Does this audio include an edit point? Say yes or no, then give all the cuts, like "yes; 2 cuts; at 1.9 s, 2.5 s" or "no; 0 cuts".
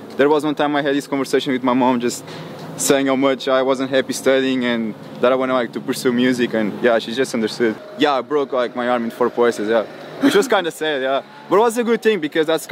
yes; 1 cut; at 7.8 s